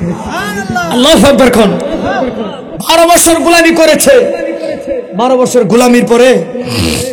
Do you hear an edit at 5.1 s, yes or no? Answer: no